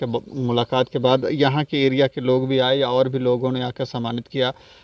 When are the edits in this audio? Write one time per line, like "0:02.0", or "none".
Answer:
none